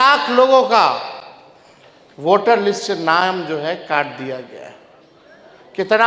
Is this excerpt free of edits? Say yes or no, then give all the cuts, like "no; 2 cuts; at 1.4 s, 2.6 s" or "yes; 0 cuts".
yes; 0 cuts